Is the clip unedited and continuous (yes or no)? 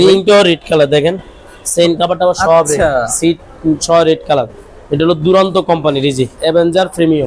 no